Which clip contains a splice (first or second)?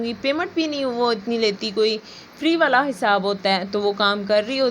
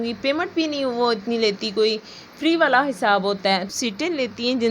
second